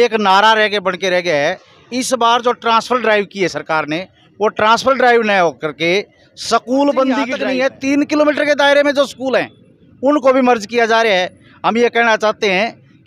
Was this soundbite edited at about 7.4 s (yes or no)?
yes